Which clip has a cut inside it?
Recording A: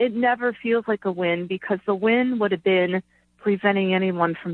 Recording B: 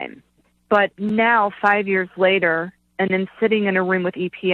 B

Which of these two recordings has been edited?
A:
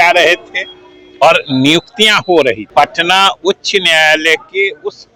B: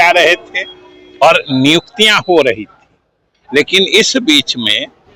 A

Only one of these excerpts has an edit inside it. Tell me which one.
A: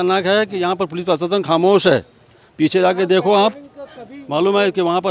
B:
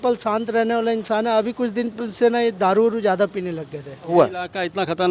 B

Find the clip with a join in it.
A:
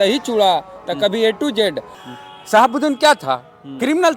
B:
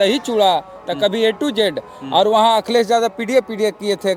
A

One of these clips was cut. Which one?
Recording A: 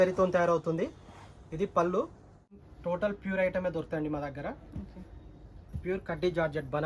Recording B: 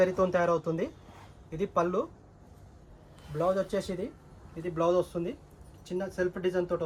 A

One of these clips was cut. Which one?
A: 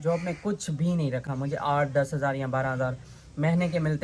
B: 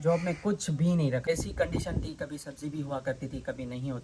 B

